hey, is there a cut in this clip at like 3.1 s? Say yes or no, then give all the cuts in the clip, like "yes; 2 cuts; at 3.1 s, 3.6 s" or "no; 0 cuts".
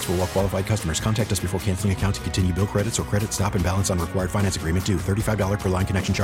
no; 0 cuts